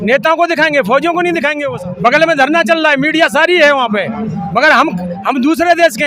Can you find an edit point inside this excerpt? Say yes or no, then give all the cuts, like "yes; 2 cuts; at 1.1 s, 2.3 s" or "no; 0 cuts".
yes; 1 cut; at 1.7 s